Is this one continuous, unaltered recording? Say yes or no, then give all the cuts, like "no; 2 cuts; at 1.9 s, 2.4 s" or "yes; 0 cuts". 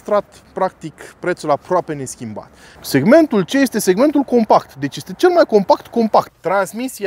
no; 2 cuts; at 2.7 s, 6.3 s